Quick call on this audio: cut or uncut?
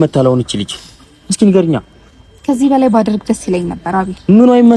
uncut